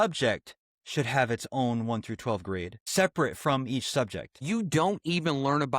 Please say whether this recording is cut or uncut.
cut